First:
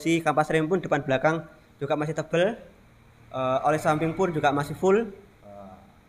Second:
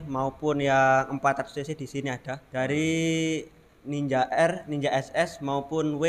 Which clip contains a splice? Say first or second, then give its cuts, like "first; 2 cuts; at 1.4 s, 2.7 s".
second; 1 cut; at 2.3 s